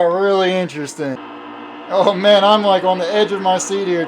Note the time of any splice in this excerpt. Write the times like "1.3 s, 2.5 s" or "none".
1.1 s

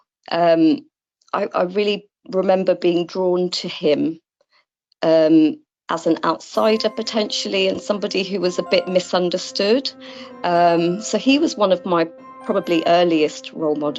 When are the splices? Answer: none

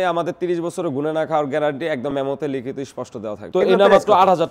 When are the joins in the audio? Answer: 3.4 s

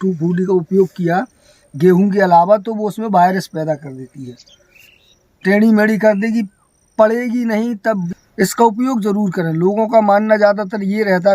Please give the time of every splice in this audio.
8.0 s

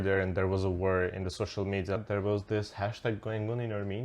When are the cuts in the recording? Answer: 2.0 s

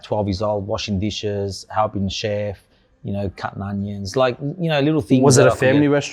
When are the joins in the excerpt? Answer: none

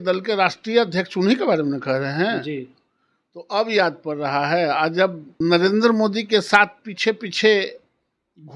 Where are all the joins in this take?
5.2 s

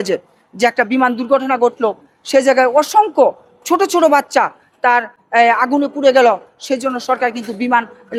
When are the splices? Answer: none

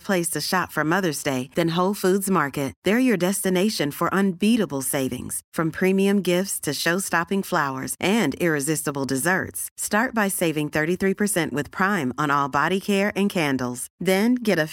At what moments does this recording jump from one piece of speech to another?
none

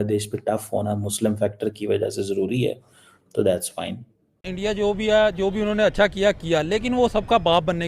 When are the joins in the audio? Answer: 4.5 s

